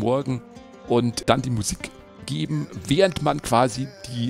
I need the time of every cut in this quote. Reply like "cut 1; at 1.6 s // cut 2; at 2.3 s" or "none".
cut 1; at 1.2 s